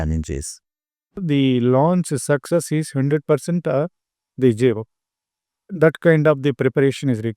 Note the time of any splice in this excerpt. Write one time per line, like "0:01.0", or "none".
0:01.2
0:05.8